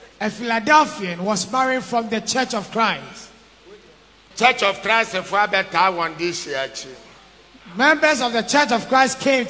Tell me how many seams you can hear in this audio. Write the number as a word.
zero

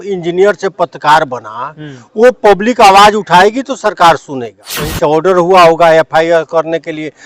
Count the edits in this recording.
one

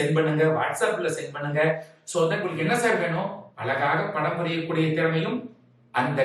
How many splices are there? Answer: one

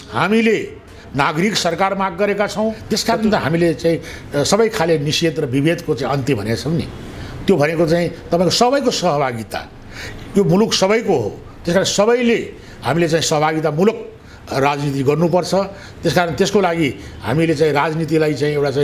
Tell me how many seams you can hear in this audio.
one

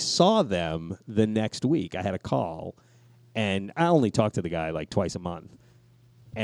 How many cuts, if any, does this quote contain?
zero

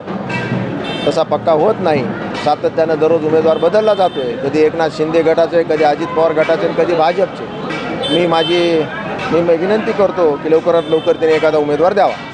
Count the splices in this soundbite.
zero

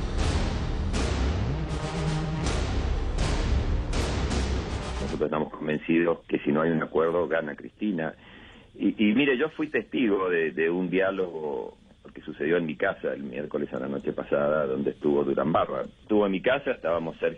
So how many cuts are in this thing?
one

